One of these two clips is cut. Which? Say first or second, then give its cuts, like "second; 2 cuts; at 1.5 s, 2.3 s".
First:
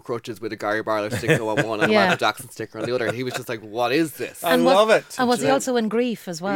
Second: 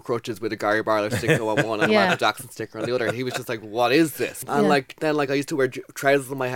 second; 1 cut; at 4.4 s